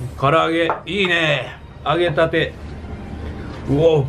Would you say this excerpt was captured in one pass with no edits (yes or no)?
yes